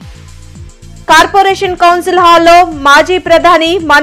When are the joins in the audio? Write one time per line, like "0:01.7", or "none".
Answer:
0:00.9